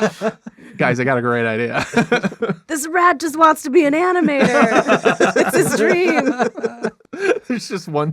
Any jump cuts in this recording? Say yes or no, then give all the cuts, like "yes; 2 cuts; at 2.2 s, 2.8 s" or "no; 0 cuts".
yes; 1 cut; at 7.0 s